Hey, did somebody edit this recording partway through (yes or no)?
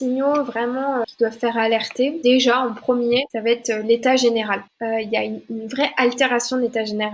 yes